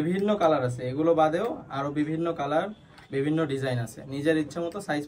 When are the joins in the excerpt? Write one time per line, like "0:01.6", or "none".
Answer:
none